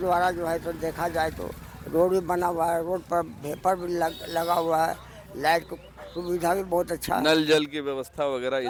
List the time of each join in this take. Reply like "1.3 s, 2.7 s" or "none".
none